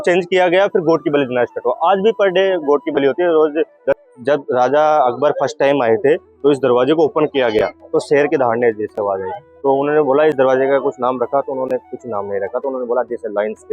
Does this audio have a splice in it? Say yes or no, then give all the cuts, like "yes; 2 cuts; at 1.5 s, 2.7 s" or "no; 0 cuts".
yes; 1 cut; at 4.0 s